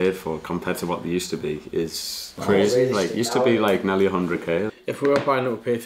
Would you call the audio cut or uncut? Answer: cut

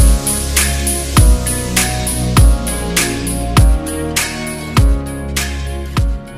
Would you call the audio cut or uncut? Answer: uncut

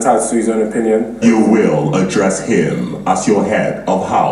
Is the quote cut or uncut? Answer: cut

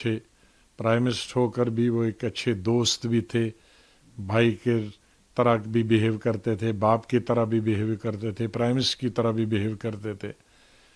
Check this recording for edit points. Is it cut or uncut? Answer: uncut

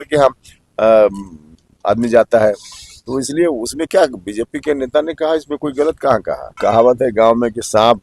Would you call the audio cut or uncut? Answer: cut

